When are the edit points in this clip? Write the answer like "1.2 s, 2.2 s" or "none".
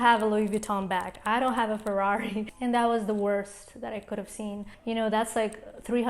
2.5 s, 4.7 s